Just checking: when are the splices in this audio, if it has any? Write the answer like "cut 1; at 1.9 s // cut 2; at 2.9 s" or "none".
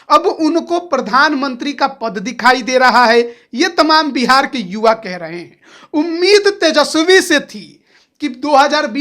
none